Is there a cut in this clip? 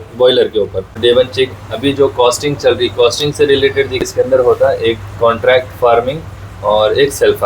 yes; 2 cuts; at 1.0 s, 4.1 s

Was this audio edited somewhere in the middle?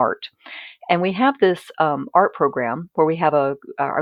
no; 0 cuts

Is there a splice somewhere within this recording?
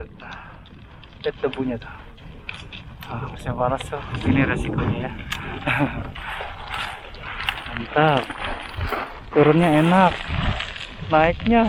no; 0 cuts

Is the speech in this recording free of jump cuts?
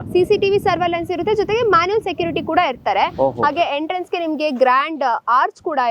yes; 0 cuts

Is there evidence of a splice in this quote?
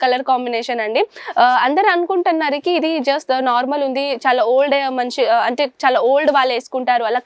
no; 0 cuts

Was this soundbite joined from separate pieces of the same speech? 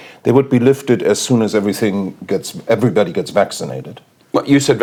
no; 0 cuts

